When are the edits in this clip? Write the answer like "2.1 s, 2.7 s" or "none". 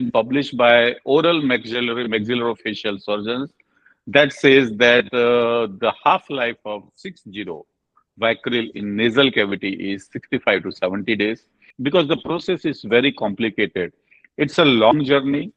11.7 s